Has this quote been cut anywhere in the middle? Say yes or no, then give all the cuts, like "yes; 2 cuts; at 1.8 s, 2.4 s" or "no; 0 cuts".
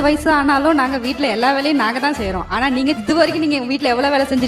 no; 0 cuts